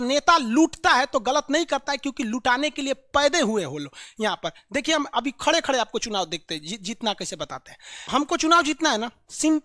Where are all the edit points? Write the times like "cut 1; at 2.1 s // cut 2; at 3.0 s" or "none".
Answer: cut 1; at 8.1 s